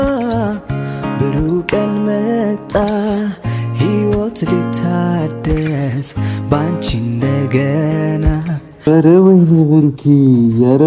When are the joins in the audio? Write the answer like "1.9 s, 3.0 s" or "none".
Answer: 8.9 s